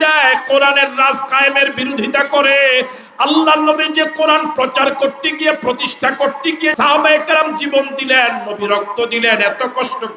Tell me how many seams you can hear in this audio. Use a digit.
1